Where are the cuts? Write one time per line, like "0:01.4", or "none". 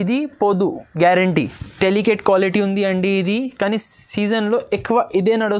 0:01.6